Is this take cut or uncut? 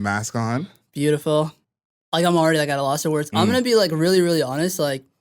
cut